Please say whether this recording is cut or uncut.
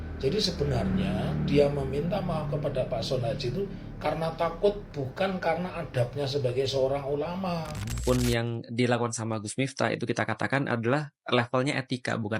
cut